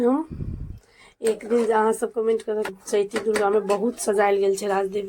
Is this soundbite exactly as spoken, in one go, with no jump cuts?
no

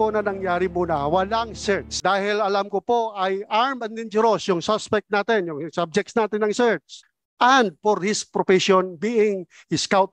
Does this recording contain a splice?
yes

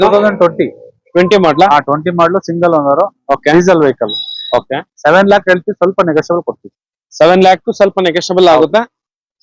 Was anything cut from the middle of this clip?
no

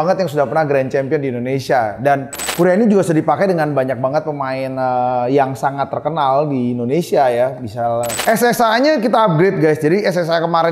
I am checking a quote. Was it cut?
yes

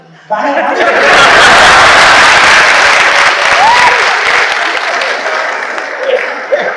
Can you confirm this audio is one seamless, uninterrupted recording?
yes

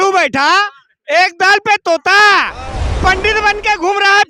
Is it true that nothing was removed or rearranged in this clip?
no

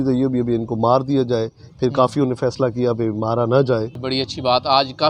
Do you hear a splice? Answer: yes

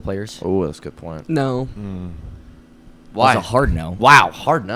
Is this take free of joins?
yes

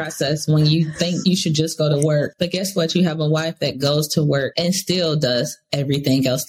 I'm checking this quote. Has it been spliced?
yes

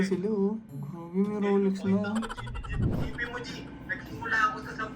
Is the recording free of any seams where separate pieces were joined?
no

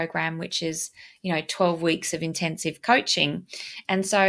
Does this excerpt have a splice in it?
no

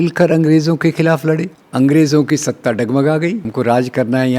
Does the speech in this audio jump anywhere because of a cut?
yes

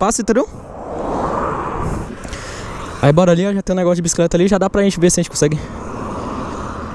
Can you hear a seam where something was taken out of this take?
yes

